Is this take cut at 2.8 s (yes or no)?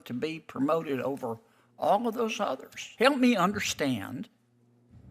yes